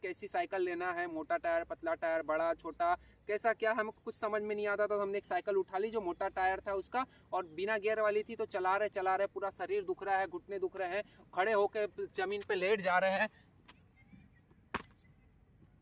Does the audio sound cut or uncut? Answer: uncut